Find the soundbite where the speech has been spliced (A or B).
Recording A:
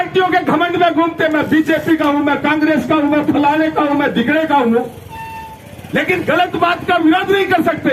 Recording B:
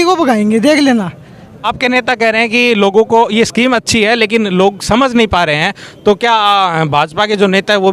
B